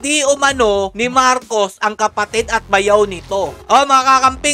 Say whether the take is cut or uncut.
cut